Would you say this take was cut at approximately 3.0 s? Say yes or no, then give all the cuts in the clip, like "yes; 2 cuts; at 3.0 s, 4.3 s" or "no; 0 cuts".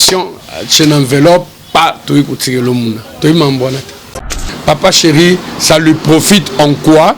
no; 1 cut; at 4.4 s